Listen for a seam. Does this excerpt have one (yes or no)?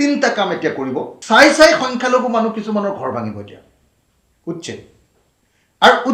yes